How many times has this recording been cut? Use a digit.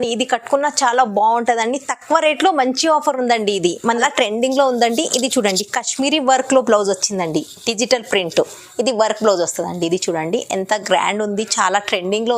1